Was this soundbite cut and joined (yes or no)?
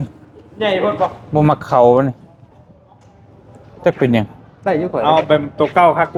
no